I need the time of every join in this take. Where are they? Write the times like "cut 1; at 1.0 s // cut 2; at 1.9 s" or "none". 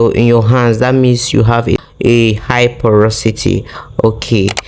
cut 1; at 1.8 s